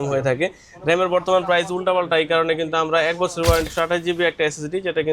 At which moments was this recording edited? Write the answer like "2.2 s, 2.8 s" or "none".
3.7 s